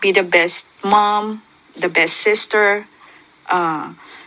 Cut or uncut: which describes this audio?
uncut